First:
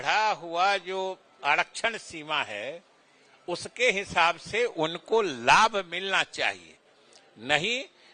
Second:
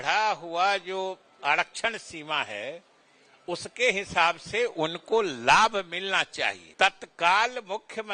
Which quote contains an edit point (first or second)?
second